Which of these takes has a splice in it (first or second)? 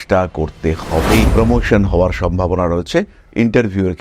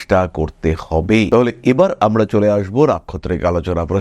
first